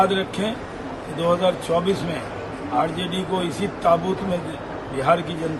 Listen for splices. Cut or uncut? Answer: uncut